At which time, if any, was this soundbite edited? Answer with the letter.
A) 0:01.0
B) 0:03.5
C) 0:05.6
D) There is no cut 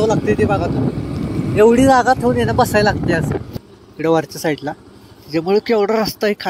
B